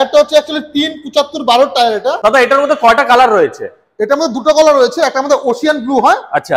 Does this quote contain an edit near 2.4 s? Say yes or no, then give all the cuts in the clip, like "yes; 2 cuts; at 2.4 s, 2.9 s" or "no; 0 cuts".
yes; 1 cut; at 2.4 s